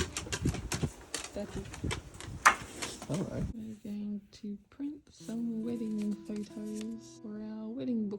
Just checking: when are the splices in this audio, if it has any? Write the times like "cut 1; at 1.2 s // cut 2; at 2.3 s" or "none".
cut 1; at 3.5 s // cut 2; at 7.1 s